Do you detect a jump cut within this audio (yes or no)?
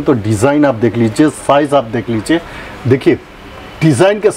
no